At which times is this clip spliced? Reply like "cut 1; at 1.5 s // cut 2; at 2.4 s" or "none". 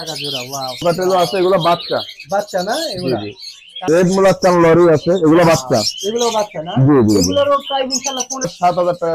cut 1; at 0.8 s // cut 2; at 3.9 s // cut 3; at 8.5 s